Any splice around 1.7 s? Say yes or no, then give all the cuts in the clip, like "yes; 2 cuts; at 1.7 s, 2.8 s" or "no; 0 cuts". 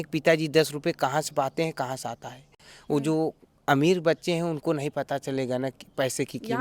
no; 0 cuts